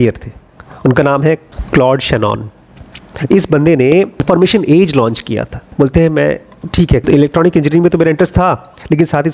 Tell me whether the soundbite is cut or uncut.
cut